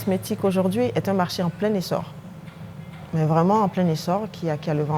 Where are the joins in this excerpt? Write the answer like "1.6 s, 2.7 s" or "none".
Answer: none